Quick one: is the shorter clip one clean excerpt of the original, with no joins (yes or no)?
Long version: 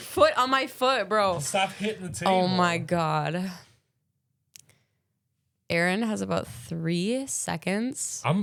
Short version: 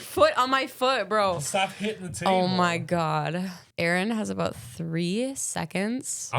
no